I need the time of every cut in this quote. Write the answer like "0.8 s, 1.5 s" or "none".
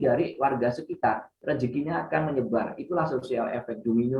1.3 s